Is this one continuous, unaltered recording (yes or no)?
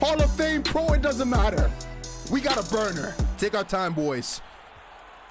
no